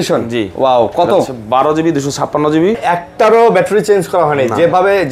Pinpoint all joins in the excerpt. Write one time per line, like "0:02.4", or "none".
0:02.8